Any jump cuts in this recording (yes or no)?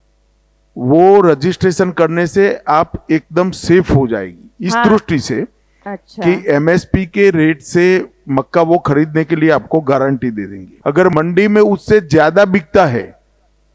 no